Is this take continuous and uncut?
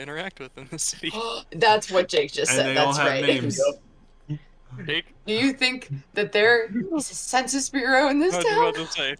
yes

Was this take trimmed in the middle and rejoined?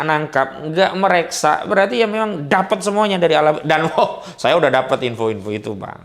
no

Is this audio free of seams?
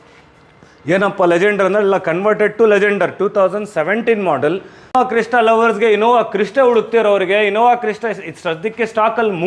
no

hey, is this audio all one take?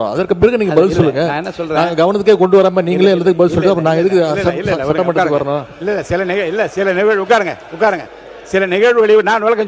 yes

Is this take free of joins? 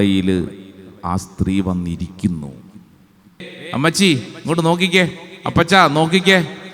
no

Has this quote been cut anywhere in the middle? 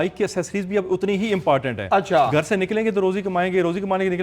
no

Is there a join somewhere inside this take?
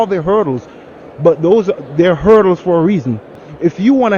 yes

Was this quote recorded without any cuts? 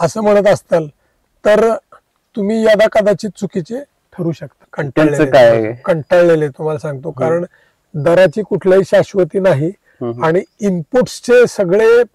no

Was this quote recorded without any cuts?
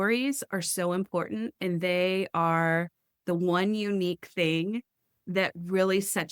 yes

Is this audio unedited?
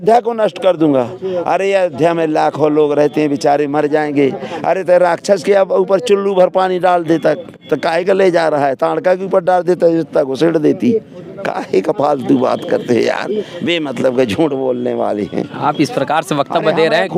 yes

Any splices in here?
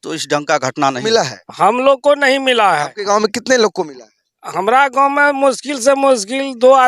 yes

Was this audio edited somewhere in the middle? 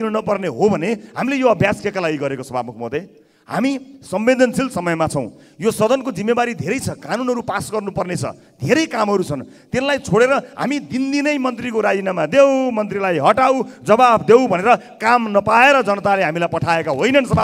no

